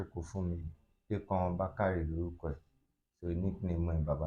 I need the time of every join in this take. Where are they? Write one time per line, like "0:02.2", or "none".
none